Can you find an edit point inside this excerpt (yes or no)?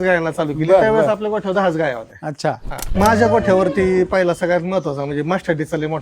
yes